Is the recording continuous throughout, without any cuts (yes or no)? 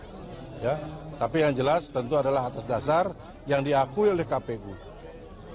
no